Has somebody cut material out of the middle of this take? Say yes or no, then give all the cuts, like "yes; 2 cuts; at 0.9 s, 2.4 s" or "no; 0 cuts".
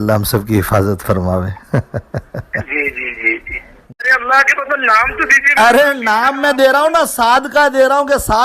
yes; 1 cut; at 4.0 s